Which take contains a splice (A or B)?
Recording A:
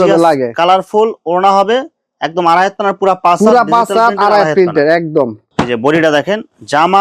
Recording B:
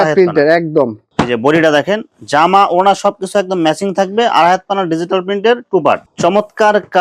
B